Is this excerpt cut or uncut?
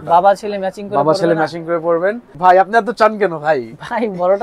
cut